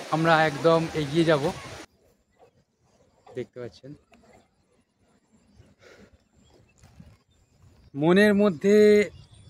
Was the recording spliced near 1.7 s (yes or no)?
yes